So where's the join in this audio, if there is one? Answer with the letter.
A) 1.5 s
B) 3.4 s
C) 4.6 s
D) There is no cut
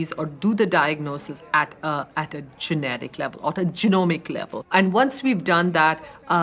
C